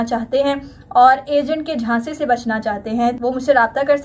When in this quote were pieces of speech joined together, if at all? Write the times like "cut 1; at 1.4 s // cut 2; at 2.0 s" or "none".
cut 1; at 3.2 s